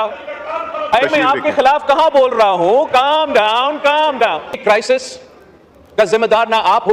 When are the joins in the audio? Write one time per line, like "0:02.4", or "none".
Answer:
0:00.9
0:04.6